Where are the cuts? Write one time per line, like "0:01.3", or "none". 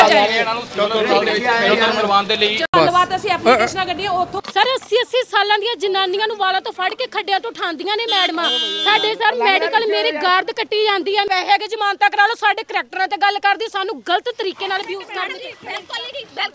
0:04.4
0:11.3